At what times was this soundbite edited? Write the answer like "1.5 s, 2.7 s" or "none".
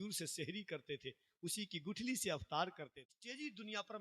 2.9 s